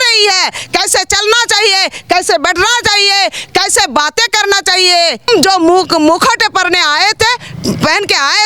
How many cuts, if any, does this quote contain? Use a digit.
1